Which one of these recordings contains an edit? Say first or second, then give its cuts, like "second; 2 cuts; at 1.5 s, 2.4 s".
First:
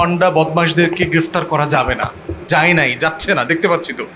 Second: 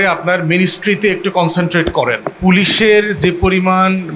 second; 1 cut; at 2.3 s